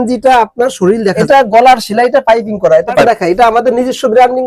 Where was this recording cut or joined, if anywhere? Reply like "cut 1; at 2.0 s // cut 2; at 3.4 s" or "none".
cut 1; at 1.2 s // cut 2; at 3.0 s